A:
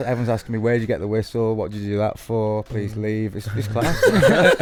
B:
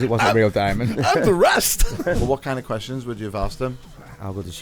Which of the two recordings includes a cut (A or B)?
B